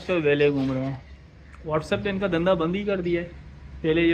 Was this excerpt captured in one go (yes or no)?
yes